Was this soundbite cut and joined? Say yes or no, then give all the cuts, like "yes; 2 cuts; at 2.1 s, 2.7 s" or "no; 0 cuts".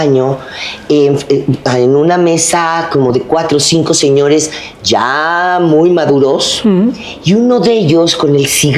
no; 0 cuts